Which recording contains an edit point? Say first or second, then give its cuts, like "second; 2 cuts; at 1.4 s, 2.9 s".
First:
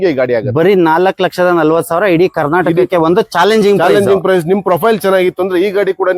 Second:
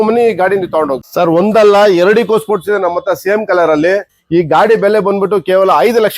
second; 2 cuts; at 1.1 s, 4.1 s